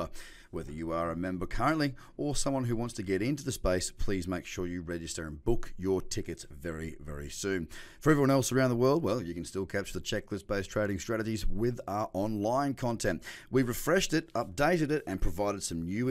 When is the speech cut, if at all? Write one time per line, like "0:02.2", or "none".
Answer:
none